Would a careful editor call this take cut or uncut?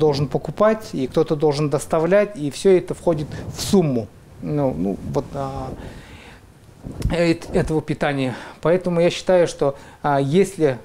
uncut